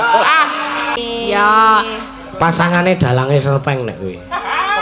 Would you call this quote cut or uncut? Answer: cut